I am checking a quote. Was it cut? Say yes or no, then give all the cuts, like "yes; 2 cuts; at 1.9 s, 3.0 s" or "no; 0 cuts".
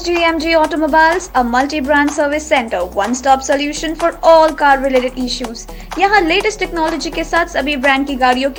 no; 0 cuts